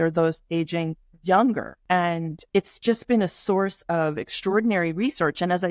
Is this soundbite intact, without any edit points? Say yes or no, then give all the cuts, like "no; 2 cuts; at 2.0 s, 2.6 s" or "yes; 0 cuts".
no; 1 cut; at 2.2 s